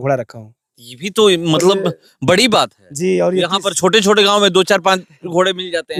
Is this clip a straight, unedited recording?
yes; 0 cuts

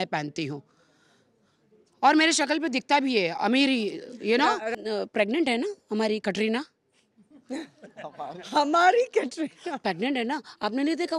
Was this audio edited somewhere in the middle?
yes; 1 cut; at 4.8 s

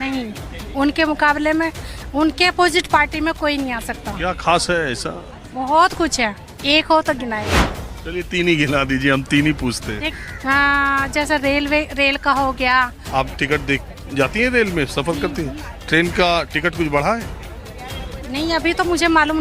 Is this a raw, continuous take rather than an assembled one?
no; 4 cuts; at 4.1 s, 7.8 s, 10.1 s, 13.0 s

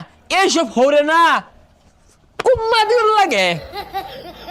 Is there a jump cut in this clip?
yes; 1 cut; at 3.6 s

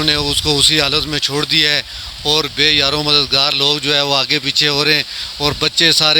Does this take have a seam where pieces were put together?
no; 0 cuts

